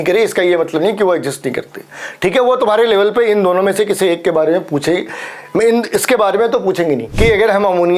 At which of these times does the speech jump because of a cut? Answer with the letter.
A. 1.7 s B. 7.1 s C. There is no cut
B